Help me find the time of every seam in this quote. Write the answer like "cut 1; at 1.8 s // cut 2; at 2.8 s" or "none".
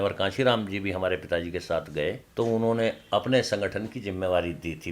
cut 1; at 2.2 s